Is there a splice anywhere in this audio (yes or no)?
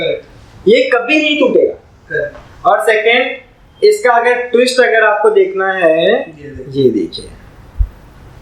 no